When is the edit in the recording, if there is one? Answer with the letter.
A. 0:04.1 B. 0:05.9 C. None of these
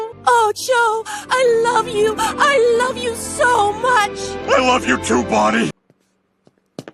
B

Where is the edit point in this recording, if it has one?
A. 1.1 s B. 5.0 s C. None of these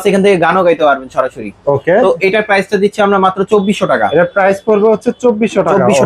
C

